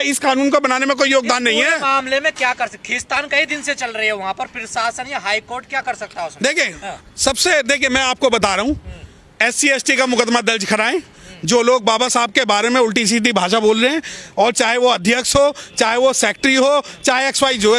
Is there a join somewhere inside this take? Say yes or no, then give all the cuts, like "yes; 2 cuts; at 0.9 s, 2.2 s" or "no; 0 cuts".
no; 0 cuts